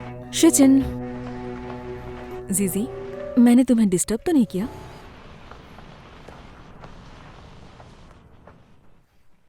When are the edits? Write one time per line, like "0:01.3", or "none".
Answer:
0:03.1
0:04.9